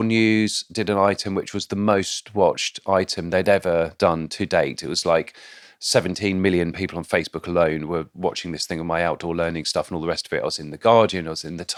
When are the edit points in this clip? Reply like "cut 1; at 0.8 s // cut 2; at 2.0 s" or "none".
none